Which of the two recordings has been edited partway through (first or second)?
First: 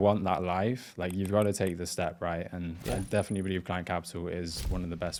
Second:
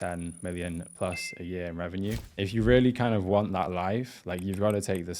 second